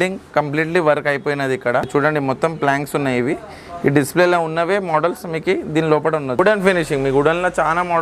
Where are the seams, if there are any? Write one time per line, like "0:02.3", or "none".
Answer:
0:01.9
0:06.4